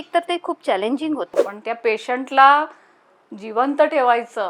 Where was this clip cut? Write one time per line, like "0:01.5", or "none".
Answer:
0:01.4